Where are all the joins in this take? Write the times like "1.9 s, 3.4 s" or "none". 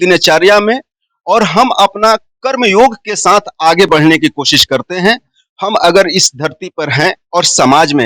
none